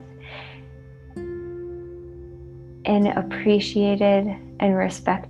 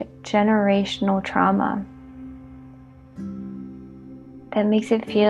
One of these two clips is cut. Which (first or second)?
second